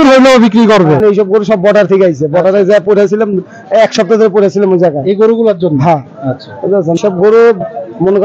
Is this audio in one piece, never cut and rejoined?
no; 2 cuts; at 1.0 s, 7.0 s

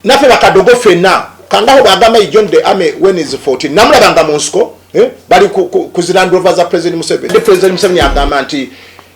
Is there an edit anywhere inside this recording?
yes; 1 cut; at 7.3 s

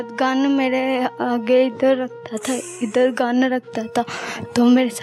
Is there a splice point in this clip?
no; 0 cuts

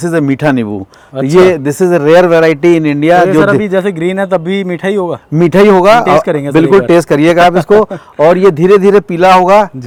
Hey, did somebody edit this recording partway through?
no; 0 cuts

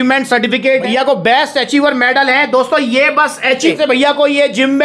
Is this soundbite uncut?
no; 2 cuts; at 0.9 s, 3.7 s

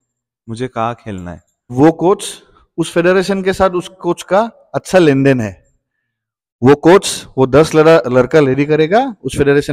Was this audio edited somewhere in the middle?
yes; 1 cut; at 1.7 s

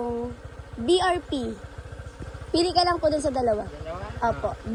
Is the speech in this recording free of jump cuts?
yes; 0 cuts

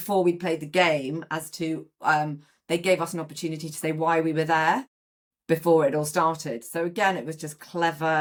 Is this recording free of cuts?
yes; 0 cuts

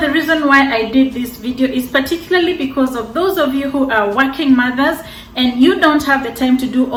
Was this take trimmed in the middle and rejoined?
no; 0 cuts

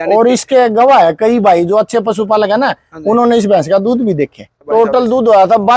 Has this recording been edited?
yes; 1 cut; at 4.6 s

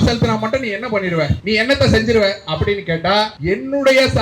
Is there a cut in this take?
yes; 2 cuts; at 1.4 s, 3.4 s

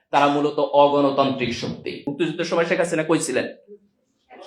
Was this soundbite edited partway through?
yes; 1 cut; at 2.0 s

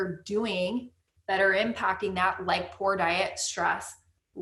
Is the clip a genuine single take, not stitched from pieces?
yes; 0 cuts

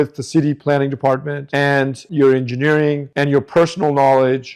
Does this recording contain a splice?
no; 0 cuts

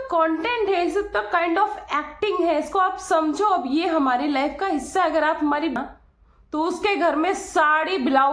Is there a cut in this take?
yes; 1 cut; at 5.8 s

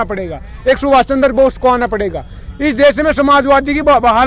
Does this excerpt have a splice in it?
no; 0 cuts

